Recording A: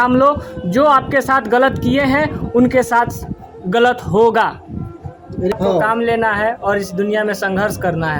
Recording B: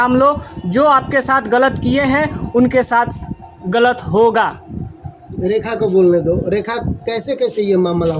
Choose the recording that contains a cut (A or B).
A